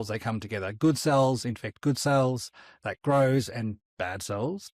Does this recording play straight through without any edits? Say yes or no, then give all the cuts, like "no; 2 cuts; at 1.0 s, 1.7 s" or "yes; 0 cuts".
yes; 0 cuts